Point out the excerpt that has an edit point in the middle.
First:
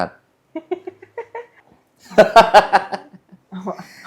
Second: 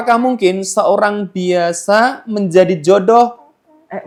first; 1 cut; at 1.6 s

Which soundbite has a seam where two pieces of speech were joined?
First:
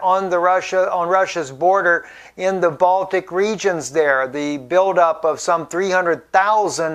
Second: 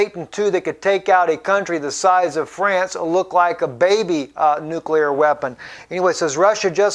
first; 1 cut; at 5.7 s

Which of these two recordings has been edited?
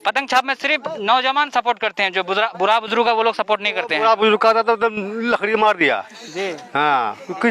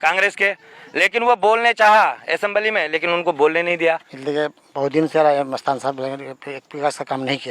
second; 1 cut; at 4.1 s

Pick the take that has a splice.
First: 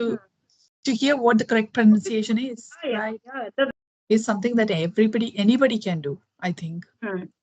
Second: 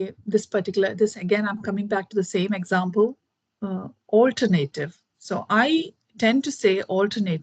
first; 1 cut; at 3.7 s

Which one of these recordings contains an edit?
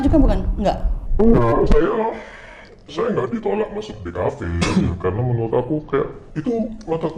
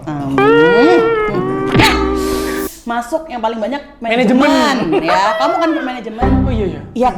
second; 1 cut; at 2.6 s

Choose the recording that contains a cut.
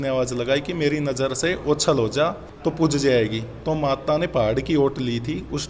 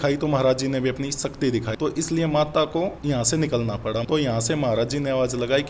second; 3 cuts; at 1.7 s, 3.0 s, 4.0 s

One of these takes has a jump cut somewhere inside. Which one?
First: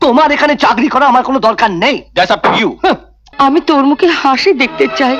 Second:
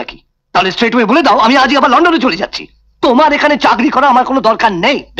first; 1 cut; at 3.2 s

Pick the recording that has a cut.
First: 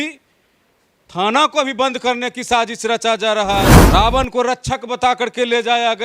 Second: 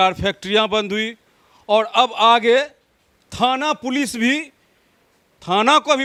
first; 1 cut; at 3.8 s

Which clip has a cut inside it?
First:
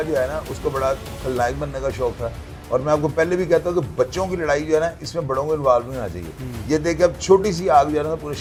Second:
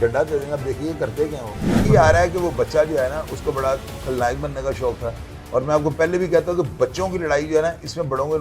second; 1 cut; at 1.9 s

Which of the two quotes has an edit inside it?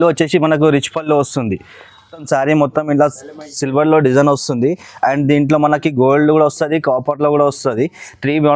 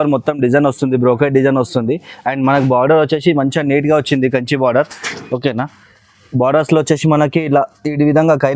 first; 1 cut; at 2.2 s

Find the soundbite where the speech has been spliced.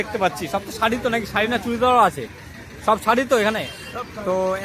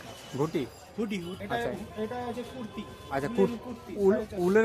second; 1 cut; at 1.3 s

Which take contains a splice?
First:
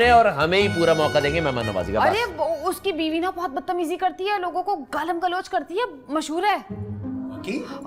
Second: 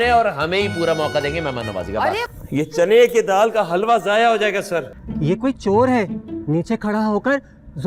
second; 2 cuts; at 2.3 s, 5.0 s

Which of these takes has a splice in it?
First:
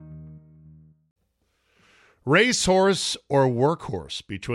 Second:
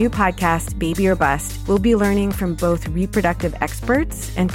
first; 1 cut; at 1.0 s

